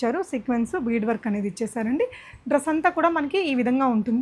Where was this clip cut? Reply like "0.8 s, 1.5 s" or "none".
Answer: none